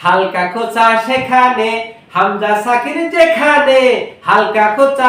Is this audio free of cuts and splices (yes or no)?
yes